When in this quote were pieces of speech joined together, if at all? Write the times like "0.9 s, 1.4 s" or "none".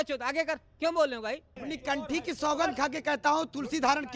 1.5 s